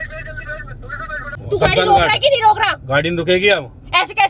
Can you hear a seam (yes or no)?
yes